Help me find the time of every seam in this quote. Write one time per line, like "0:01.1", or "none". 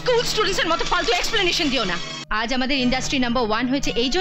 0:02.1